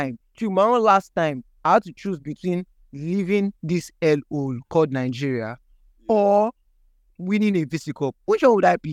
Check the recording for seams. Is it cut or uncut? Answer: uncut